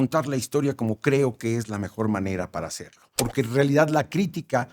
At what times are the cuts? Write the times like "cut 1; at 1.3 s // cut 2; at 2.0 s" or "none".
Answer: cut 1; at 3.2 s